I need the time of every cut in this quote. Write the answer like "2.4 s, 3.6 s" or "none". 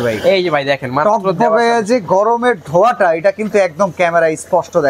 none

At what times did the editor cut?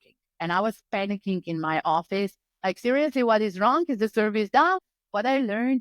4.8 s

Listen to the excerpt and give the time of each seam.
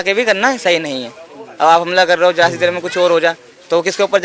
none

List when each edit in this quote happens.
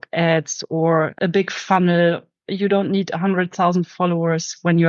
1.1 s

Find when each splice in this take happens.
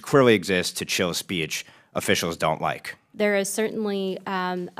2.9 s

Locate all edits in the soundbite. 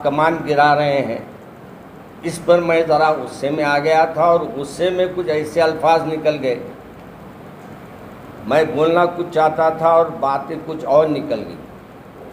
none

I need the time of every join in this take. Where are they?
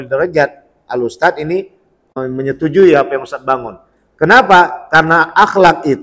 none

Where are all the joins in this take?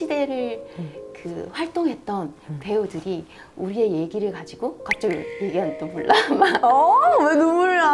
none

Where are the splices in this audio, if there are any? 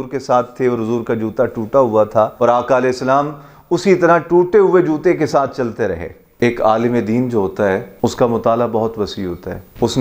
2.3 s, 6.2 s, 7.9 s

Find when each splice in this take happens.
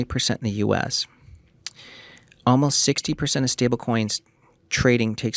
none

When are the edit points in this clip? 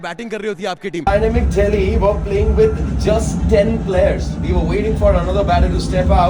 1.0 s

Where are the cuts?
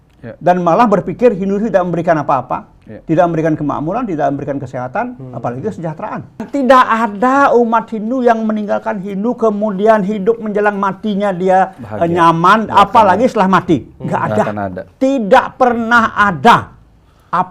6.5 s

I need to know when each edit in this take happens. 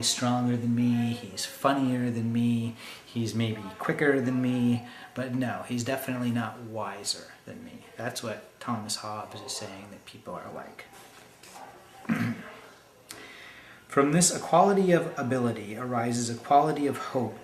none

